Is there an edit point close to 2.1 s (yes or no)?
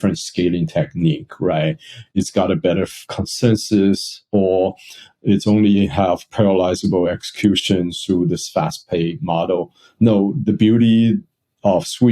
yes